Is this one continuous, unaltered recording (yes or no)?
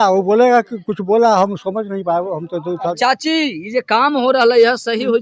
no